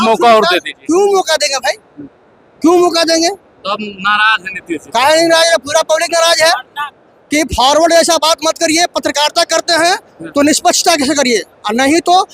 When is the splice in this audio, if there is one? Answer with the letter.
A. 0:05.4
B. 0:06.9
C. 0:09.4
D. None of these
B